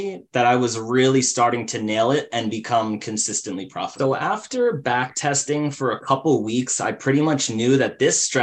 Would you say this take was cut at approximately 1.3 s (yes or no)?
no